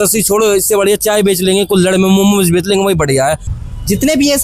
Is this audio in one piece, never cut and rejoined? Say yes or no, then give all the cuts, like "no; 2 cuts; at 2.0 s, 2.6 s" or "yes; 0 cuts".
no; 1 cut; at 3.5 s